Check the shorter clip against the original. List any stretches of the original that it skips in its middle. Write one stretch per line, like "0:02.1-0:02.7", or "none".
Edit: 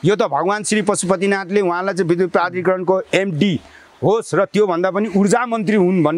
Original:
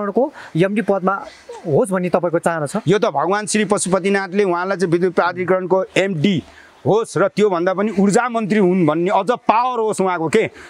none